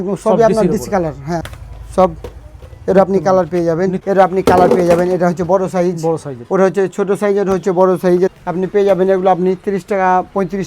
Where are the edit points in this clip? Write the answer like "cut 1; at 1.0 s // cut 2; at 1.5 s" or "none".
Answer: cut 1; at 1.3 s // cut 2; at 4.0 s // cut 3; at 8.3 s